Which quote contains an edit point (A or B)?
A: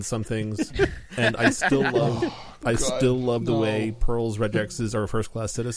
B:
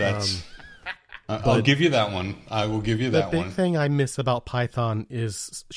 B